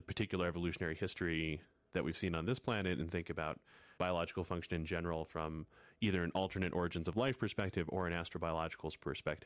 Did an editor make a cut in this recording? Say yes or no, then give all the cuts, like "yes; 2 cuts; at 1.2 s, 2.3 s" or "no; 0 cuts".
no; 0 cuts